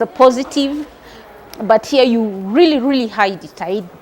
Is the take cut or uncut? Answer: uncut